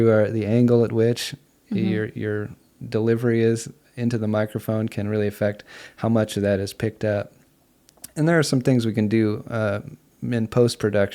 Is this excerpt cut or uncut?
uncut